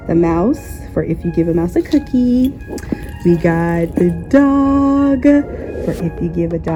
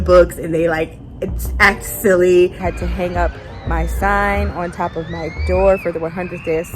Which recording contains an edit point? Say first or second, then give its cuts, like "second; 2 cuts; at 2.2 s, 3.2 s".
second; 1 cut; at 2.6 s